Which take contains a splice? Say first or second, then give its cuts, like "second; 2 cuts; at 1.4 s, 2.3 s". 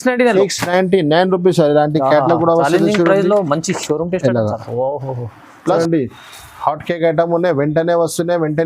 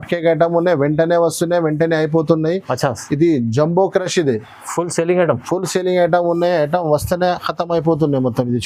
first; 1 cut; at 5.8 s